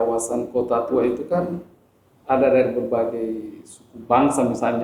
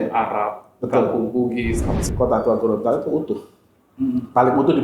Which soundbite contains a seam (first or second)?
second